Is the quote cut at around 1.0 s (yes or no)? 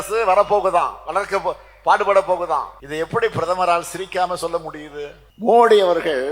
no